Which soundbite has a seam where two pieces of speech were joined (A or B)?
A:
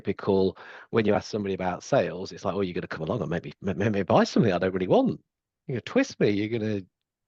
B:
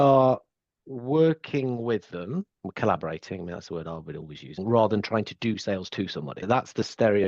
B